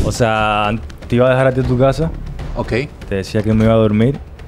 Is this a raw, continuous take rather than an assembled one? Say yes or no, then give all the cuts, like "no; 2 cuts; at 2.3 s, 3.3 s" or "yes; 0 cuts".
yes; 0 cuts